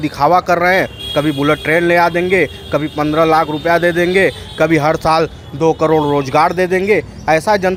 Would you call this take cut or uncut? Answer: uncut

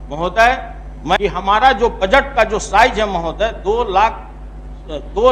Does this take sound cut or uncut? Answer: cut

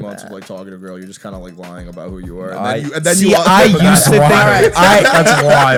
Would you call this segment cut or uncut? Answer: uncut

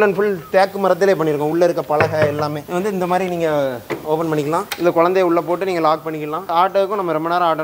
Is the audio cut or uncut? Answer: cut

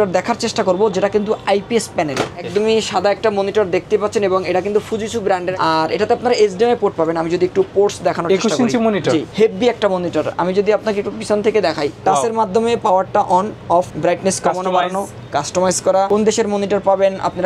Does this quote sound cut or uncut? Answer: cut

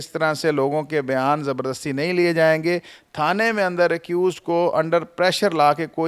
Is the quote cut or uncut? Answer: uncut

